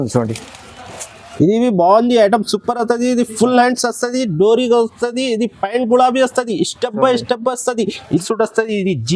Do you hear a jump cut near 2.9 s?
no; 2 cuts; at 1.2 s, 8.2 s

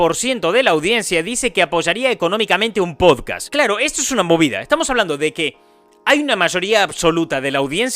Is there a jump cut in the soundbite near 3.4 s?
yes; 1 cut; at 3.4 s

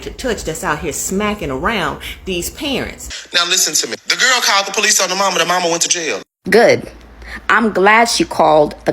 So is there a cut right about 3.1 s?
yes; 1 cut; at 3.1 s

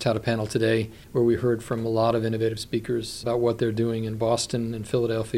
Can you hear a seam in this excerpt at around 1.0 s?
no; 1 cut; at 3.1 s

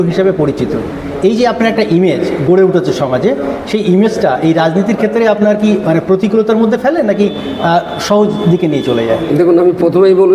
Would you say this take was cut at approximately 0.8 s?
no; 0 cuts

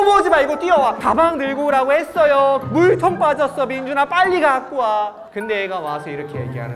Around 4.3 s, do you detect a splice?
no; 2 cuts; at 1.0 s, 2.6 s

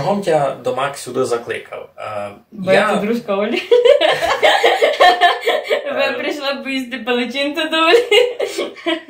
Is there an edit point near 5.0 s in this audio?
no; 0 cuts

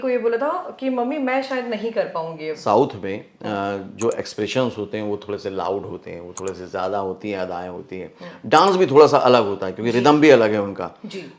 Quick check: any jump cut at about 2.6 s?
yes; 1 cut; at 2.6 s

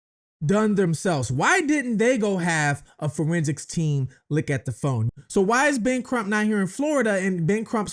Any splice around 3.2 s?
no; 1 cut; at 5.0 s

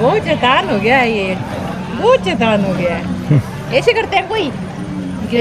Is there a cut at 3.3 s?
no; 0 cuts

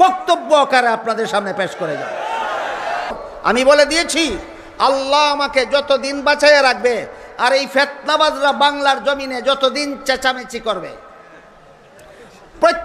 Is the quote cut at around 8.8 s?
no; 1 cut; at 3.1 s

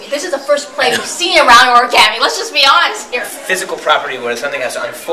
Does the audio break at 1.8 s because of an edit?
no; 1 cut; at 3.2 s

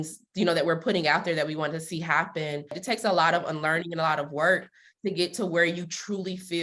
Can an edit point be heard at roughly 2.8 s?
yes; 1 cut; at 2.8 s

